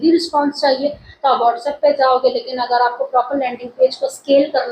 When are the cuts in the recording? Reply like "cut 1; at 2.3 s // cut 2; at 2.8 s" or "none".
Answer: none